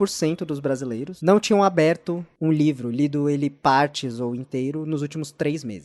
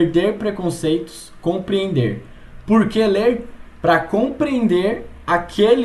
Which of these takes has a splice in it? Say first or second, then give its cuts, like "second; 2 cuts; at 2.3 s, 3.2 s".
first; 1 cut; at 1.1 s